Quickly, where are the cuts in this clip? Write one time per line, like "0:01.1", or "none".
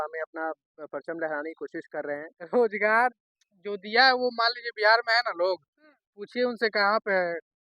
0:02.3